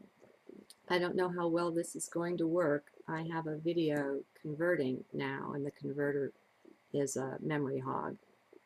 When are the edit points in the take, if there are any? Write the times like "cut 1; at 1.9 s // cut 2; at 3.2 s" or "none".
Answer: none